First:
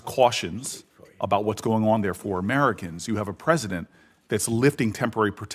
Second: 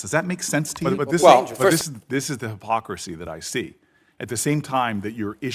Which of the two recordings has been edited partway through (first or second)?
second